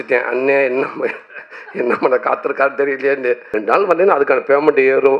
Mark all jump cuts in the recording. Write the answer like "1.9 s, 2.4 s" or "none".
3.5 s